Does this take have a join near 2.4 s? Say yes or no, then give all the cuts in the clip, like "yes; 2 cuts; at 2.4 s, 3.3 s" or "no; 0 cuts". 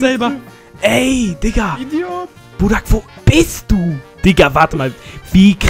no; 1 cut; at 4.1 s